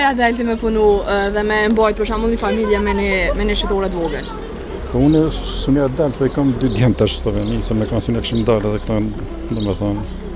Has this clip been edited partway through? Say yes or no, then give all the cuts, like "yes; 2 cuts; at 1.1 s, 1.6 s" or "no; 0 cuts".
no; 0 cuts